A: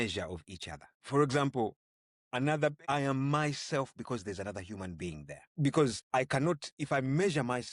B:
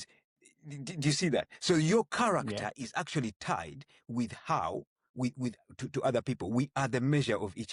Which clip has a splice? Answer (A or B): A